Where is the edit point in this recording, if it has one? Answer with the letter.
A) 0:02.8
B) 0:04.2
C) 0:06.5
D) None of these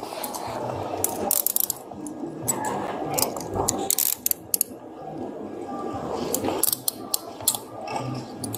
D